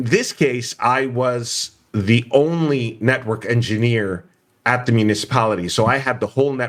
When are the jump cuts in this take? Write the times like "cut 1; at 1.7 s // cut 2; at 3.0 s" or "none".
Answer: none

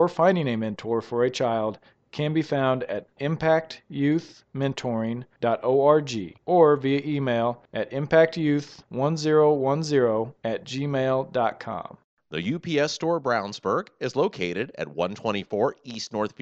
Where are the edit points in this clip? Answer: cut 1; at 12.0 s

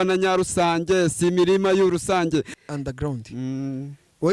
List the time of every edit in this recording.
cut 1; at 2.5 s

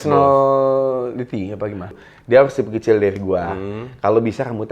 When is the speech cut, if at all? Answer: cut 1; at 2.0 s

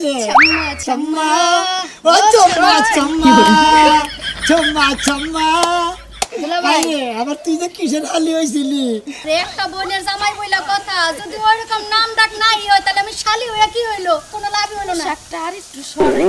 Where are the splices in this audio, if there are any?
cut 1; at 9.1 s

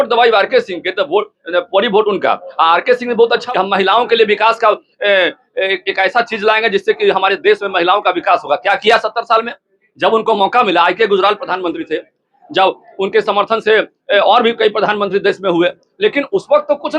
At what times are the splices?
cut 1; at 3.4 s

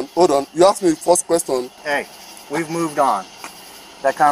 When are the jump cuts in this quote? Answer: cut 1; at 1.8 s

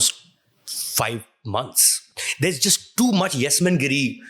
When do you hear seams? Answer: cut 1; at 2.2 s

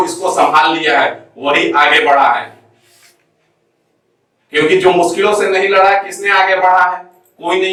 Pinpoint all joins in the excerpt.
none

